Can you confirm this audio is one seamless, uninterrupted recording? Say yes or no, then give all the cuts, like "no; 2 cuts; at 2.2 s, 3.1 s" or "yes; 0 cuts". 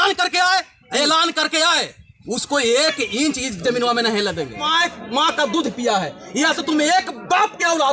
no; 1 cut; at 4.7 s